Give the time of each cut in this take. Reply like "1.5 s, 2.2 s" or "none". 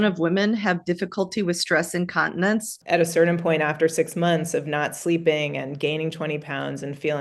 2.7 s